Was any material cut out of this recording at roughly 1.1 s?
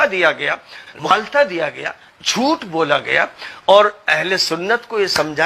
yes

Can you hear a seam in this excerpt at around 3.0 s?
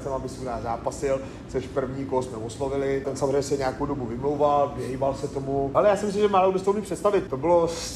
yes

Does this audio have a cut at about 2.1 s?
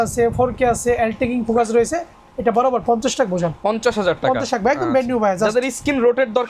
no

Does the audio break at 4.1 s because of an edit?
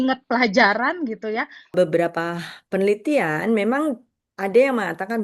no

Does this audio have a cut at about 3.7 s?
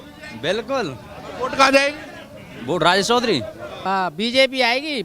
yes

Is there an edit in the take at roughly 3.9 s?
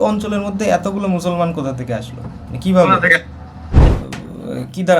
yes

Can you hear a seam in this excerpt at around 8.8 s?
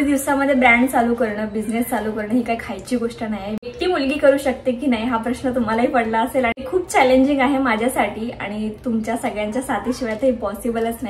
no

